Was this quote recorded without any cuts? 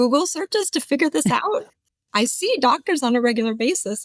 no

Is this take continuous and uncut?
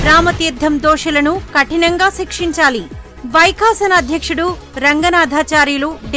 yes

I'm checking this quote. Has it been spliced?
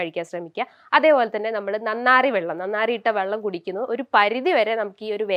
no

